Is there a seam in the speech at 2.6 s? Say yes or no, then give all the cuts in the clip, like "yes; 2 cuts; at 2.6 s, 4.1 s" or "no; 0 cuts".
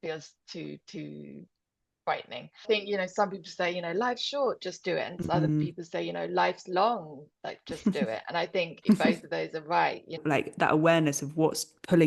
yes; 2 cuts; at 2.6 s, 10.2 s